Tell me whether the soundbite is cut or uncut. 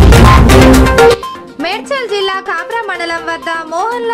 uncut